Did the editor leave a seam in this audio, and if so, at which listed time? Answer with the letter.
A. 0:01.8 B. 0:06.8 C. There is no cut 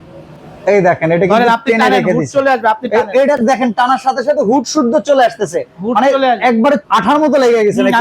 B